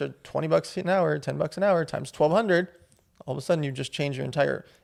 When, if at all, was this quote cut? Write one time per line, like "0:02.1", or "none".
none